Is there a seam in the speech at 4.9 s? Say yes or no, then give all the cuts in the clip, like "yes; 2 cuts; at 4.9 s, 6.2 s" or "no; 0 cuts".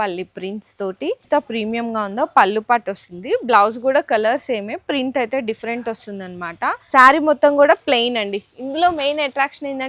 no; 2 cuts; at 1.2 s, 6.8 s